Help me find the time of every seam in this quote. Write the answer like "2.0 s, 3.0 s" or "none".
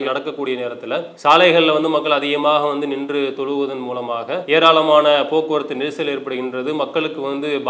none